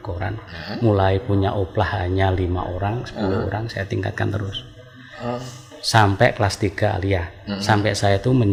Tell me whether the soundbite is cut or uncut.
uncut